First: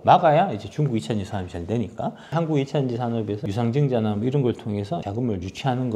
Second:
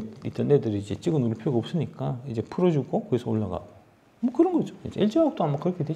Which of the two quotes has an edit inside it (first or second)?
first